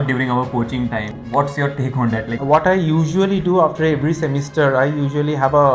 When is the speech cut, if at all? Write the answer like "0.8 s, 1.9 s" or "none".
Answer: 1.1 s, 2.4 s